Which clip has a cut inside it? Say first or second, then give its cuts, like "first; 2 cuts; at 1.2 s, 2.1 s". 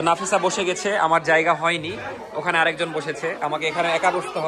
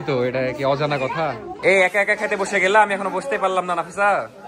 second; 1 cut; at 1.5 s